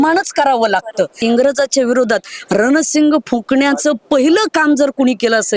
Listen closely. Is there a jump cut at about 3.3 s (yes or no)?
no